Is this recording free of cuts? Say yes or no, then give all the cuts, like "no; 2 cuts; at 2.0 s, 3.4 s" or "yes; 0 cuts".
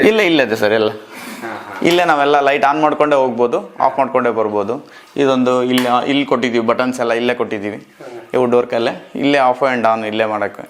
yes; 0 cuts